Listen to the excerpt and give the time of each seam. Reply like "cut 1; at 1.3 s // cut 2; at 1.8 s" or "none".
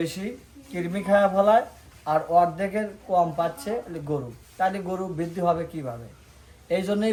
none